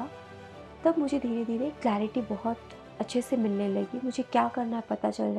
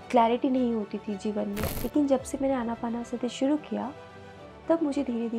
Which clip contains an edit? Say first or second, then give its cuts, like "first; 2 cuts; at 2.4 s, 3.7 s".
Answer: second; 1 cut; at 1.6 s